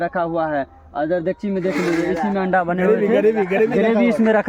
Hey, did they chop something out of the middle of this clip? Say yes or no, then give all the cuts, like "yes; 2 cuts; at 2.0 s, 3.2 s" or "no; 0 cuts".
no; 0 cuts